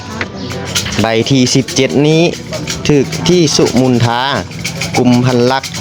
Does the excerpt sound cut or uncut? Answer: uncut